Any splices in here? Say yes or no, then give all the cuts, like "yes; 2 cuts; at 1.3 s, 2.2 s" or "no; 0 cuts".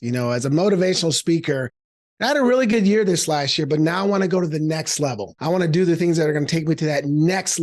yes; 1 cut; at 5.3 s